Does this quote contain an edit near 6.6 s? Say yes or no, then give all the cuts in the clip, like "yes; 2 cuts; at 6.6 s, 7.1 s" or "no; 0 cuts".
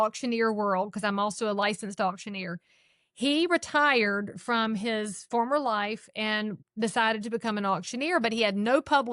yes; 1 cut; at 6.6 s